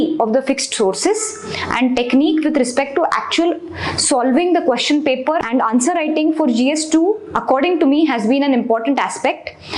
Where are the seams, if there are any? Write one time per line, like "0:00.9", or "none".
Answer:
0:05.4

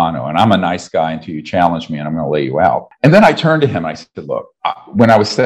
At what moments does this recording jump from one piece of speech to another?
0:02.9
0:04.5

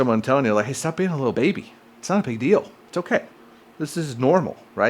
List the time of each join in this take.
0:01.3

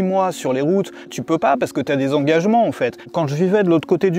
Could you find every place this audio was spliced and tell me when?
0:01.2
0:03.1

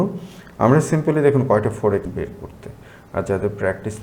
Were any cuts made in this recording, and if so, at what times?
0:02.1

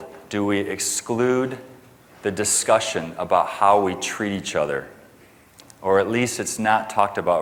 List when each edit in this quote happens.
none

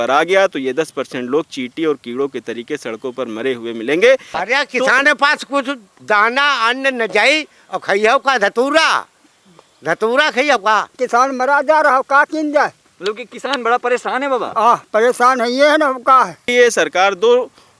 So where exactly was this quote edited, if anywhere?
0:04.3
0:11.0
0:16.4

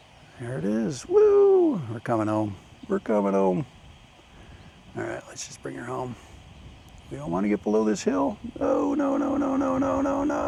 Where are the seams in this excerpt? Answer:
none

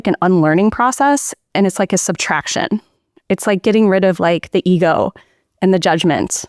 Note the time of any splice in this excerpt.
none

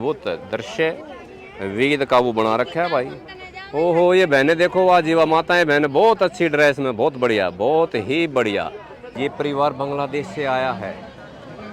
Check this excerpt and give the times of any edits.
0:09.1

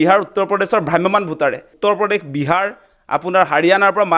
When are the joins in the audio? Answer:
0:01.7

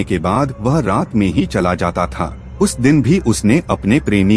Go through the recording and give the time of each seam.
none

